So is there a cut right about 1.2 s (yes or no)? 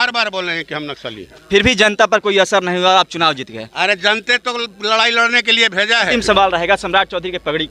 no